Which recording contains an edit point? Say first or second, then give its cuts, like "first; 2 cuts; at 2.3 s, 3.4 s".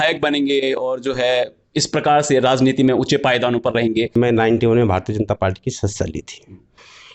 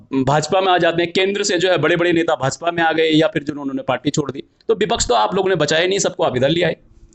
first; 1 cut; at 4.1 s